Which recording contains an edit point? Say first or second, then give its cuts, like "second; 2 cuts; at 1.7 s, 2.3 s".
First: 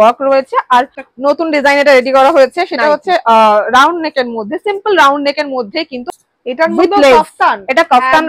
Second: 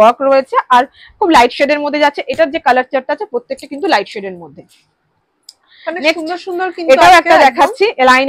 first; 2 cuts; at 1.0 s, 6.0 s